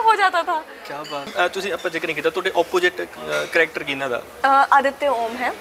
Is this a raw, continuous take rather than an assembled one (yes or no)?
no